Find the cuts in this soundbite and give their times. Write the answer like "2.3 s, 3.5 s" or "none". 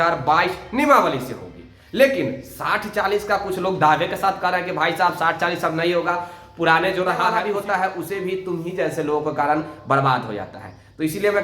7.3 s